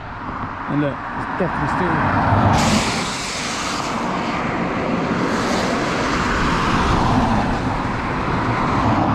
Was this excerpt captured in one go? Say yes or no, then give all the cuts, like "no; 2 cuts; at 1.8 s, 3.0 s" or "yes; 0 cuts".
yes; 0 cuts